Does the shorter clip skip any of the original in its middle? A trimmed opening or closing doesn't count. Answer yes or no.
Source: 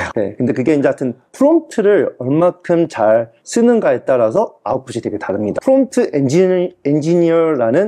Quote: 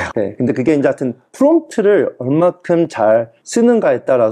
no